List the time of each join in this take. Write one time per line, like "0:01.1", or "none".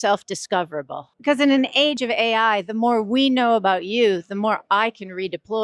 0:01.0
0:02.0